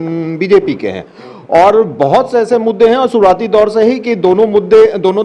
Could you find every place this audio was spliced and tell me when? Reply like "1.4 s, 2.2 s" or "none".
none